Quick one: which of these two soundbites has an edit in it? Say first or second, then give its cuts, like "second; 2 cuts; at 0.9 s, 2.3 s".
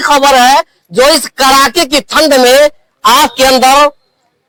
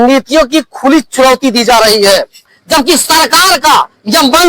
second; 1 cut; at 2.6 s